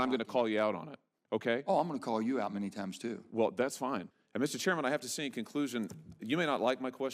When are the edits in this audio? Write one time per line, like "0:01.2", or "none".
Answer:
0:04.1